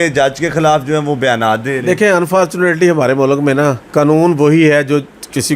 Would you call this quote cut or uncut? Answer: cut